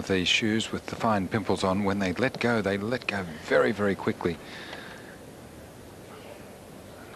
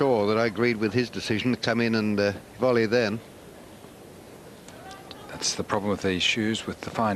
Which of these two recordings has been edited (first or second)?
second